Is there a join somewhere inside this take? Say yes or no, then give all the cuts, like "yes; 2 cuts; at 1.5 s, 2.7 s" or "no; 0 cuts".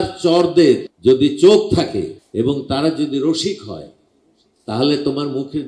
yes; 2 cuts; at 0.9 s, 2.2 s